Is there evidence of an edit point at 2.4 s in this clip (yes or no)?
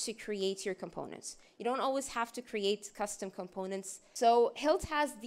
no